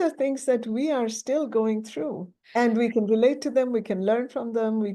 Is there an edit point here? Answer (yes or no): yes